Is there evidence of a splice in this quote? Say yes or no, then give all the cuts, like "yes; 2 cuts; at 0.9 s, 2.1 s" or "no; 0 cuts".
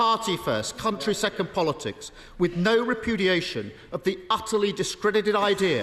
no; 0 cuts